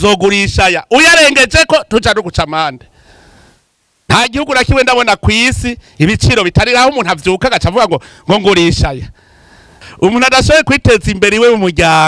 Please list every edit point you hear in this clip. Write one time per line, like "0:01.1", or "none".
0:09.8